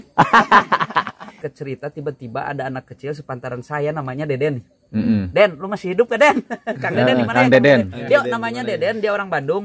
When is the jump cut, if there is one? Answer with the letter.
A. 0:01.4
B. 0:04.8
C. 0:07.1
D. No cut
A